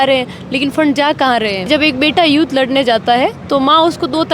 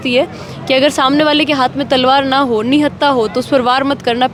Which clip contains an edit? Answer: first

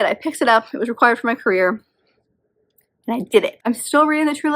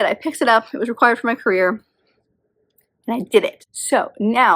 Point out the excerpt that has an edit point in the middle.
second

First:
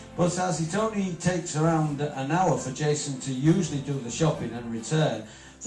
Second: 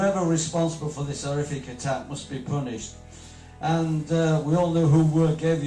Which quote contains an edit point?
second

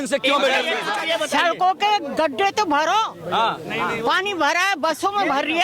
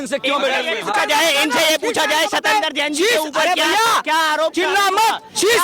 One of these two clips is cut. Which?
first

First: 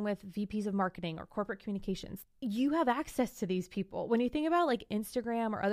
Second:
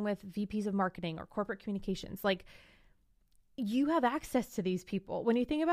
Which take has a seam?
first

